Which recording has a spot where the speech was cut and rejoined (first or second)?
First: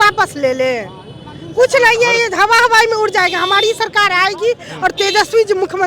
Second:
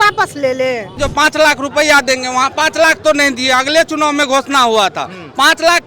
second